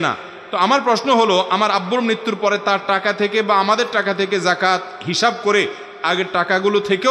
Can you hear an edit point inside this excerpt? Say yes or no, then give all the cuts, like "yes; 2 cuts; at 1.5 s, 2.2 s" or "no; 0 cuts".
no; 0 cuts